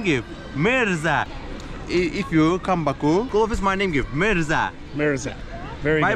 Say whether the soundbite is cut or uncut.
uncut